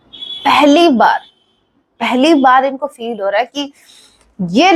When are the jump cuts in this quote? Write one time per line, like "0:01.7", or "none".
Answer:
none